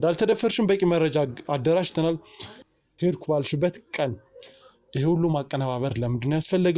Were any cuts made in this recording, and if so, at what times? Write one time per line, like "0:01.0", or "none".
0:02.5